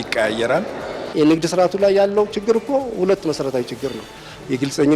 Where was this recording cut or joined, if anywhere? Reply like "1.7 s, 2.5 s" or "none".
1.1 s